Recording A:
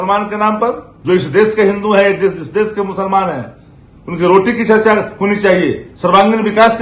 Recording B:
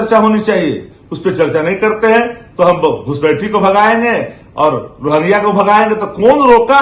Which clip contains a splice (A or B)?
A